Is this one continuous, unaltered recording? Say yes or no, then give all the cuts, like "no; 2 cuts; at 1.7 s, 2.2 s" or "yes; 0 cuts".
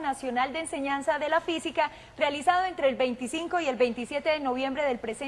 no; 1 cut; at 4.2 s